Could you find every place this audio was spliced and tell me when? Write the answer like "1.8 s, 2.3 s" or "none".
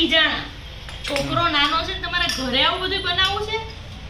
none